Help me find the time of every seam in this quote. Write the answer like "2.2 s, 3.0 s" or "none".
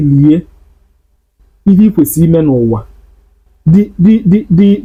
none